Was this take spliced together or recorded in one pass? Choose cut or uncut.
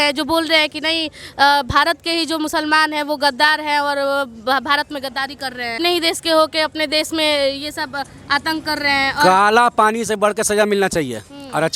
cut